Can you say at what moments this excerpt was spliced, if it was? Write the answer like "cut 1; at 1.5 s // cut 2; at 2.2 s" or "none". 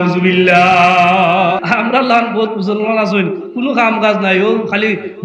cut 1; at 1.6 s